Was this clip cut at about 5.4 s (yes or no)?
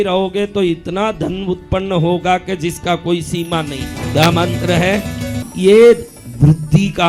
yes